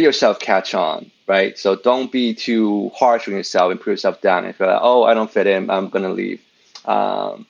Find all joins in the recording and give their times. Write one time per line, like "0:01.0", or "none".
none